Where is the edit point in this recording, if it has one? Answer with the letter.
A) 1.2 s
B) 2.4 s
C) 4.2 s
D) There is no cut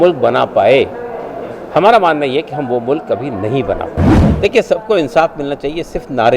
C